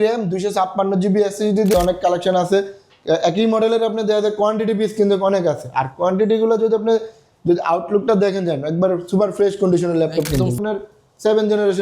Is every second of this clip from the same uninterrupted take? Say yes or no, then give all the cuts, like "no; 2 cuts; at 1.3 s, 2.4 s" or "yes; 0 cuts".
no; 2 cuts; at 1.7 s, 10.6 s